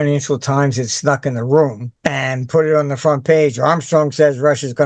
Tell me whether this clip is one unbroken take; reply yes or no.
no